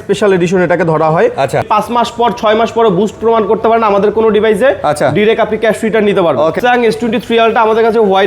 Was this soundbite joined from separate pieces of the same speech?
yes; 2 cuts; at 1.6 s, 6.6 s

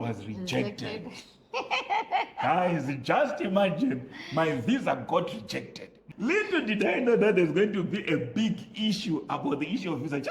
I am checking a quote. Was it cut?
yes; 1 cut; at 5.9 s

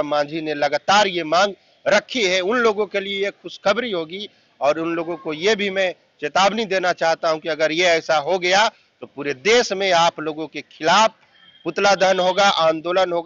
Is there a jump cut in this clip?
no; 0 cuts

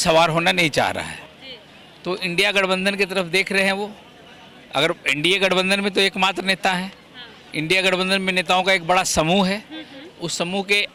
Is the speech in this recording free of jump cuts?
yes; 0 cuts

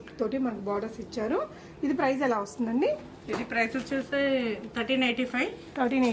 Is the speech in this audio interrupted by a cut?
no; 0 cuts

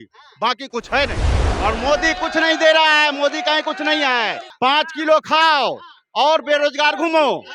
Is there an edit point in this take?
yes; 2 cuts; at 1.5 s, 4.4 s

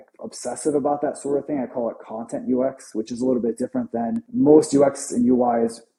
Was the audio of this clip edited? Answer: no; 0 cuts

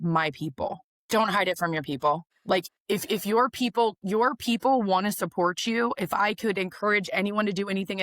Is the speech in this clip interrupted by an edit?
yes; 2 cuts; at 0.9 s, 2.3 s

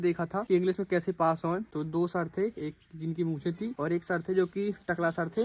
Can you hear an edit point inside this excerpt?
no; 0 cuts

